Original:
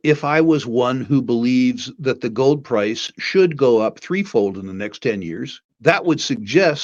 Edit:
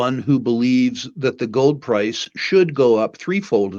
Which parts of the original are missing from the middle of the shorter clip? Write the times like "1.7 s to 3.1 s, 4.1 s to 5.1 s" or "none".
none